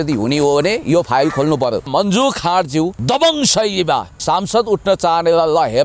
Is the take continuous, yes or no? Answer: no